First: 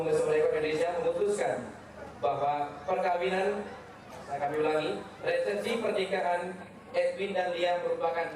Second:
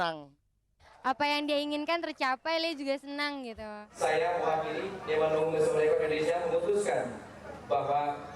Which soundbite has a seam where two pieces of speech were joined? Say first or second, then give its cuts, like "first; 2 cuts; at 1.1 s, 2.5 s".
second; 1 cut; at 3.8 s